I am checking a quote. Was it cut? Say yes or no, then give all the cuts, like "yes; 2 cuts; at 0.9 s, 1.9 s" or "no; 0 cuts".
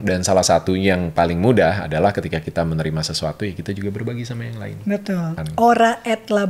yes; 1 cut; at 5.4 s